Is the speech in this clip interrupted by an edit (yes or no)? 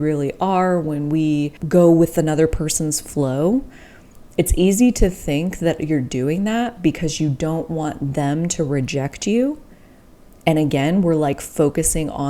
yes